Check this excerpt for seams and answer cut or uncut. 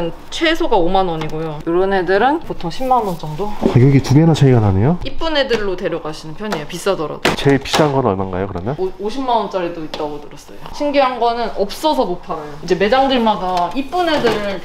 cut